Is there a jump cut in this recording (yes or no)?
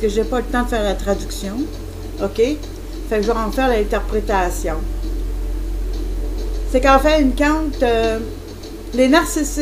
yes